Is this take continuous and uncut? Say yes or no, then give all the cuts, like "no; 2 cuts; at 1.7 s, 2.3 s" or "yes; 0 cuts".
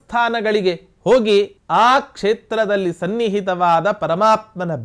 no; 1 cut; at 1.6 s